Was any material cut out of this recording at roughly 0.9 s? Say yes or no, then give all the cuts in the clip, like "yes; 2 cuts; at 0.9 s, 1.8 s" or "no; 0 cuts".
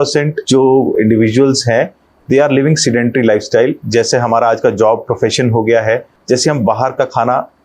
yes; 3 cuts; at 0.9 s, 3.8 s, 6.1 s